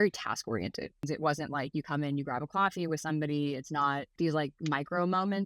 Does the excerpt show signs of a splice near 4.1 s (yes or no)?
yes